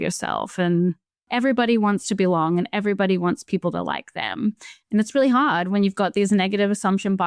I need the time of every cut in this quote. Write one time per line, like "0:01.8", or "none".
0:01.3